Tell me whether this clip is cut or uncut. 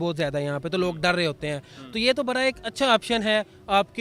uncut